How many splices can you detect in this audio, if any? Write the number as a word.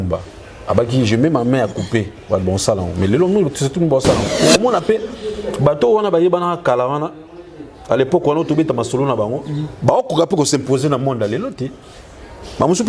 one